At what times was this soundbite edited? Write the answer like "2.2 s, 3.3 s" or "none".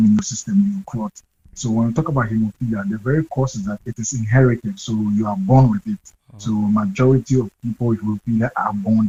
none